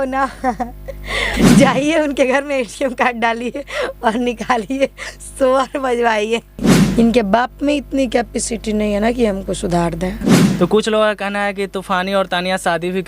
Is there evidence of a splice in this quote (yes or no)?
yes